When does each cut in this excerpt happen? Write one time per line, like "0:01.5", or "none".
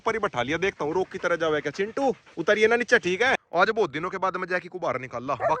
0:03.4

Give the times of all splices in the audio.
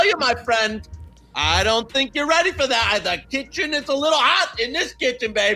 none

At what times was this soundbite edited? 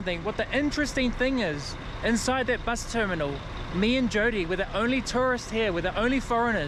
none

